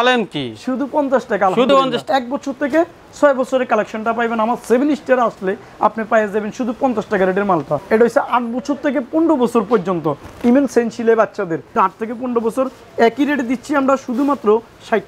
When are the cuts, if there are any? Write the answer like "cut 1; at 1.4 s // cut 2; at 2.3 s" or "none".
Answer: cut 1; at 1.7 s // cut 2; at 7.8 s // cut 3; at 11.7 s